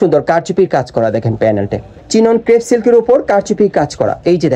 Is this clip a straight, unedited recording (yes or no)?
no